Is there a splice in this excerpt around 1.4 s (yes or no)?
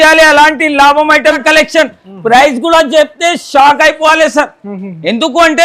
yes